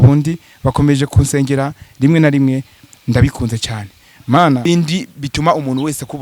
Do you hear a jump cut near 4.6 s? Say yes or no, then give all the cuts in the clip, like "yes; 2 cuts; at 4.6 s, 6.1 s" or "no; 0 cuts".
yes; 1 cut; at 4.6 s